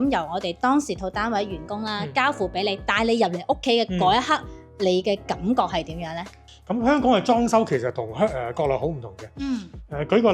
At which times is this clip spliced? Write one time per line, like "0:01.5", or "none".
0:06.4